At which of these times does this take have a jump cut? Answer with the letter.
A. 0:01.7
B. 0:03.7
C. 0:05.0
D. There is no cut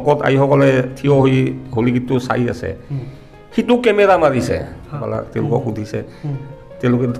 C